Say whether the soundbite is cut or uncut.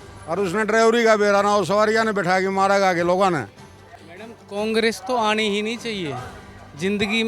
cut